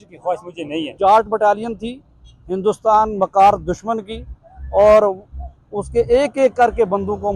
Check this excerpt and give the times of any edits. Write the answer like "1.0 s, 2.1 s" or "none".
0.9 s